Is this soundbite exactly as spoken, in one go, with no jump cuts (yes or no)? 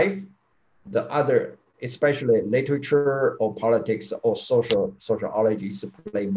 yes